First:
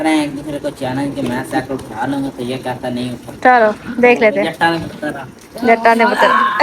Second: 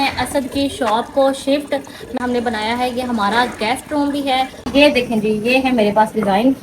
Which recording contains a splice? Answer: second; 2 cuts; at 2.2 s, 4.7 s

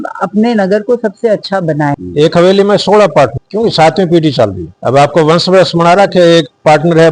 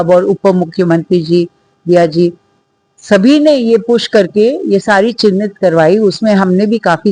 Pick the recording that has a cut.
first; 3 cuts; at 2.0 s, 3.4 s, 4.7 s

